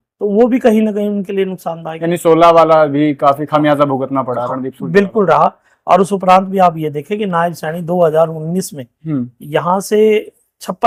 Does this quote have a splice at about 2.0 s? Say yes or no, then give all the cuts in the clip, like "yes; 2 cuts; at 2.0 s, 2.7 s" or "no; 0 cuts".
no; 0 cuts